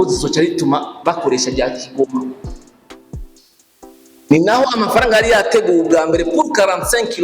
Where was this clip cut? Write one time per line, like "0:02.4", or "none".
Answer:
0:02.4
0:03.9